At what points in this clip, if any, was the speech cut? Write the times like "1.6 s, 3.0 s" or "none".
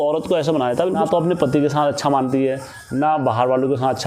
1.0 s